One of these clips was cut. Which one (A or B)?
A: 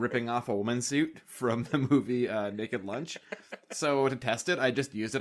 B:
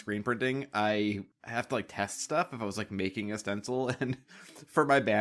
B